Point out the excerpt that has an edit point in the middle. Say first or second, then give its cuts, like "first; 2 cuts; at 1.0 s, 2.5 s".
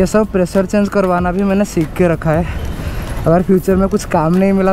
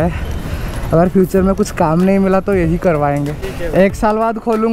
second; 1 cut; at 3.4 s